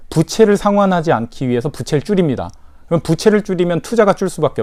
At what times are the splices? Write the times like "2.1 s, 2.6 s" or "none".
none